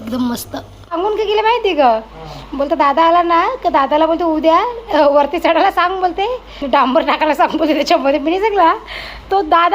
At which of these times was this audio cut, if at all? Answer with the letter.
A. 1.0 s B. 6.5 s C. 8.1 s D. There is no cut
A